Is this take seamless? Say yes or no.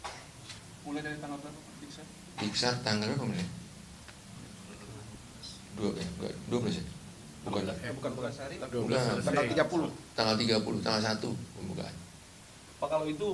no